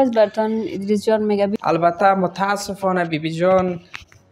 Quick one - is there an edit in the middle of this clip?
yes; 1 cut; at 1.5 s

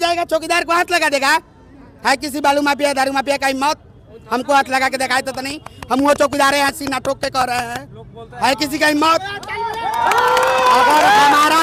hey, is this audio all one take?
yes; 0 cuts

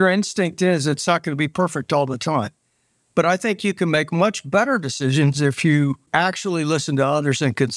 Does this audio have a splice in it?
yes; 1 cut; at 6.1 s

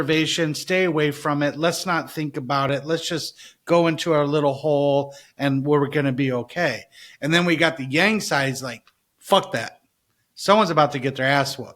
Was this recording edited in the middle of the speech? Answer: no; 0 cuts

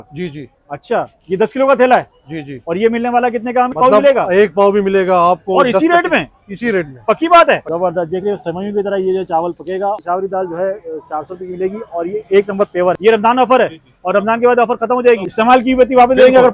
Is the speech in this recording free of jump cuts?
no; 5 cuts; at 3.8 s, 7.6 s, 10.0 s, 13.0 s, 15.3 s

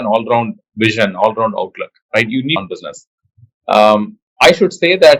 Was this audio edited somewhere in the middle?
yes; 1 cut; at 2.6 s

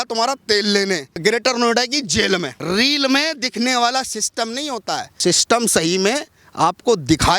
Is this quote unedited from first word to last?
no; 3 cuts; at 1.2 s, 2.5 s, 5.1 s

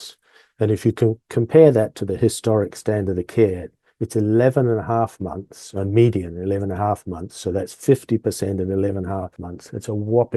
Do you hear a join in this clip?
yes; 1 cut; at 9.4 s

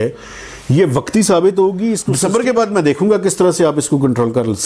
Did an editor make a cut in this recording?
yes; 1 cut; at 2.1 s

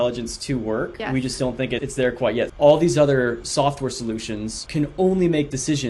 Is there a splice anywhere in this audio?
yes; 1 cut; at 2.5 s

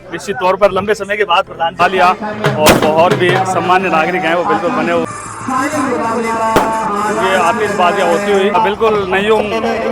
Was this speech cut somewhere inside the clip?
yes; 3 cuts; at 1.8 s, 5.0 s, 8.5 s

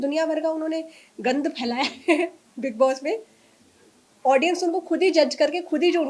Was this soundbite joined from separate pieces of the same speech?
no; 0 cuts

